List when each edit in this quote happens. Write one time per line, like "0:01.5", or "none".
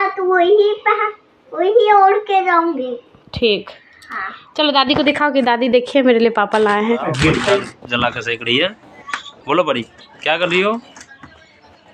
0:07.8

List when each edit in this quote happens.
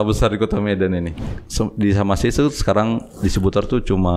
0:01.2

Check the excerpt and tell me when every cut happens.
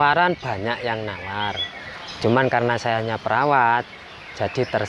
none

